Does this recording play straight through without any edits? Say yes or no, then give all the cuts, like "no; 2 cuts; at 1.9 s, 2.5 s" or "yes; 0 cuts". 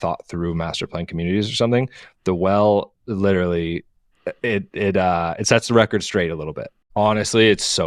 no; 1 cut; at 6.8 s